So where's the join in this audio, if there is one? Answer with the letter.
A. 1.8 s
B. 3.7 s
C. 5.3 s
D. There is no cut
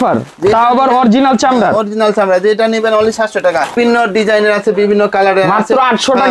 B